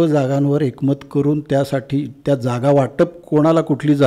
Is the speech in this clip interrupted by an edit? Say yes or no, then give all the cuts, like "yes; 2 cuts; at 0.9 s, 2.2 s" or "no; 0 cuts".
no; 0 cuts